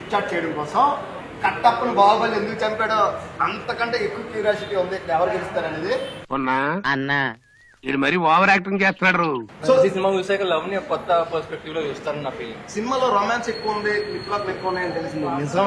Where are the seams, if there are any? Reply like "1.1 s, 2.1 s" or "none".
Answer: 1.2 s, 9.5 s